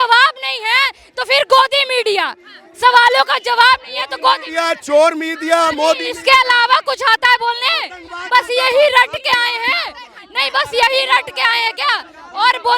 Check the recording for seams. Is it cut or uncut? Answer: uncut